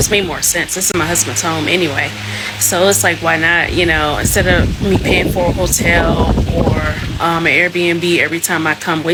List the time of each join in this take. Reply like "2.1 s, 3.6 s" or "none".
none